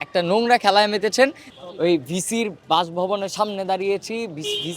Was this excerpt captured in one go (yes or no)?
no